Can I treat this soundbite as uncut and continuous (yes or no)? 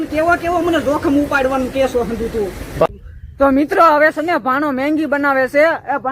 no